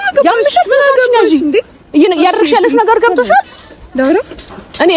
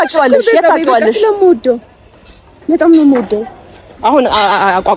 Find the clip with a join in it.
second; 1 cut; at 3.9 s

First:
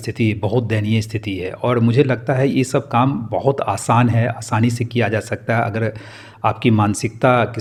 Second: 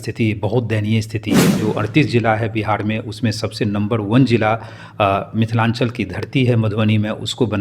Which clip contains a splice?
second; 1 cut; at 1.6 s

